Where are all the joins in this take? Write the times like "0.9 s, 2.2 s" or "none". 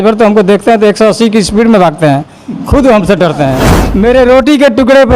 3.7 s